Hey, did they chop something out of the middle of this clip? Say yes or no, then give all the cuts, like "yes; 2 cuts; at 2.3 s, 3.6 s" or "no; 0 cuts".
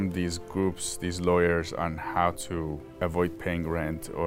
yes; 1 cut; at 2.8 s